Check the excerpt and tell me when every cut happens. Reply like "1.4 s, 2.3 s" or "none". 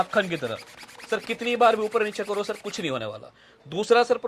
none